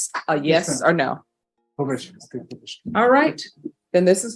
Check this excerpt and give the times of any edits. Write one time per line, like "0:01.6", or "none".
none